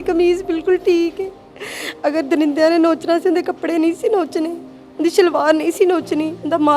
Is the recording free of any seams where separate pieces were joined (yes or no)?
yes